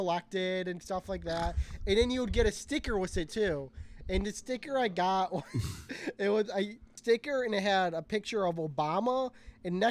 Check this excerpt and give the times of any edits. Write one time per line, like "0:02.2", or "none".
0:07.0